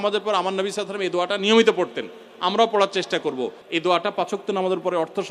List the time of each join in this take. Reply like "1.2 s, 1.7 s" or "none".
3.6 s